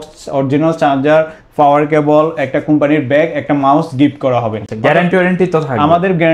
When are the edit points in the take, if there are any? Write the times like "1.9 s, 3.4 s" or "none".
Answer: none

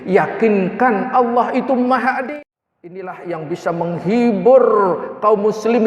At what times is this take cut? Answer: 2.3 s

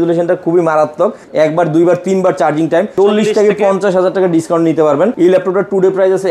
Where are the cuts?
1.2 s, 2.9 s, 5.1 s

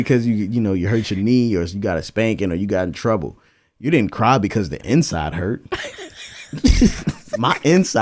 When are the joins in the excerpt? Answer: none

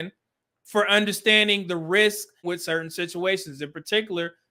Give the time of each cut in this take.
2.4 s

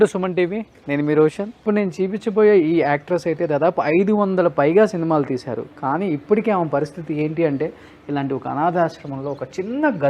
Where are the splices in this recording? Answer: 1.5 s

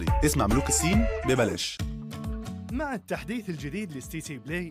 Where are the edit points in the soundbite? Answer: 1.8 s

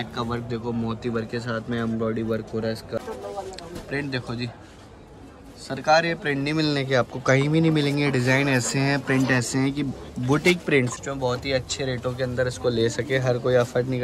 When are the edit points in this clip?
3.0 s, 10.9 s

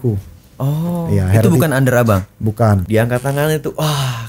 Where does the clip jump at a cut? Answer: 2.8 s

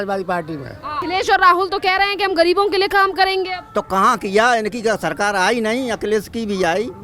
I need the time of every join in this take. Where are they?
0.9 s

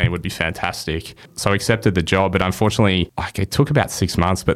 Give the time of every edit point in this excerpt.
1.3 s, 3.2 s

